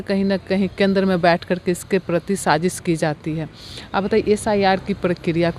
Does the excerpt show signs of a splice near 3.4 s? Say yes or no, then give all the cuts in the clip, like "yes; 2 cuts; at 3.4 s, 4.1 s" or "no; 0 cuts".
no; 0 cuts